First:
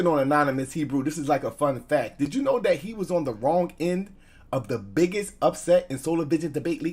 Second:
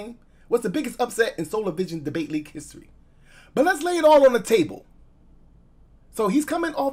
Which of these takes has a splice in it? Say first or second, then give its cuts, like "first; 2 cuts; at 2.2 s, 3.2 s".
first; 1 cut; at 2.3 s